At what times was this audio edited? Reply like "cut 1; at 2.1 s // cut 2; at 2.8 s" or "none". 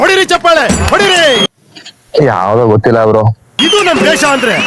none